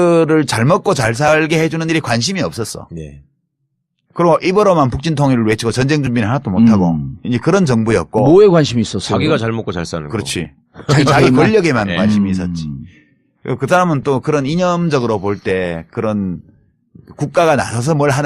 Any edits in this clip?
yes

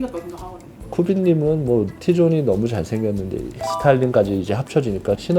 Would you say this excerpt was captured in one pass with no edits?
no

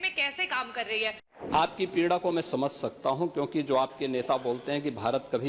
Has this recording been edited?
yes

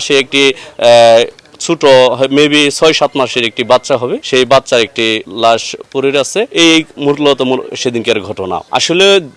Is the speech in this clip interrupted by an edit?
no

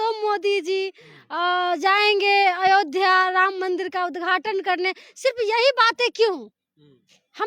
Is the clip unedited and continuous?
yes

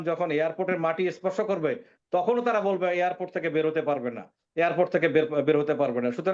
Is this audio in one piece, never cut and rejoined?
yes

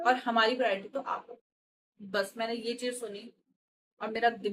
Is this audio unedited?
yes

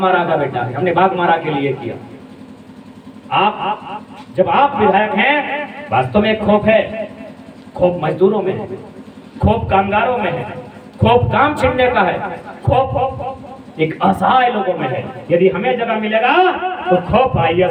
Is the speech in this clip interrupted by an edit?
no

